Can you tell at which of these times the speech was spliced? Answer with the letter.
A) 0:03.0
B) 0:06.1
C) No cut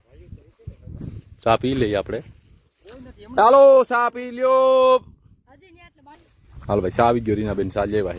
B